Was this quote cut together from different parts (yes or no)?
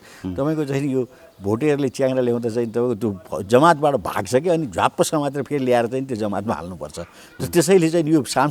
no